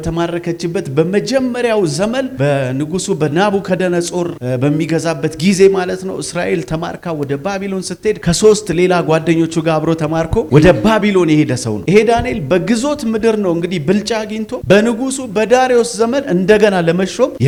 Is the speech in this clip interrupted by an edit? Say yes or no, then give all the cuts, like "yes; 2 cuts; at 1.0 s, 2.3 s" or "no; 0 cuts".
no; 0 cuts